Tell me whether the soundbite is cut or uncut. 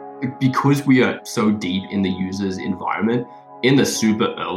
uncut